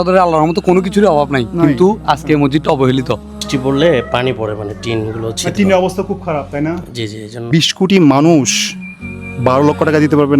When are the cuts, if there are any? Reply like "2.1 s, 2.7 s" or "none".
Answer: 3.4 s, 7.5 s